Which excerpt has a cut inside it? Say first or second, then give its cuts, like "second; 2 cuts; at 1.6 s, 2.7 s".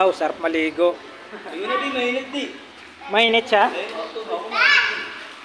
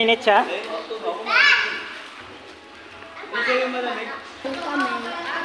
second; 1 cut; at 4.4 s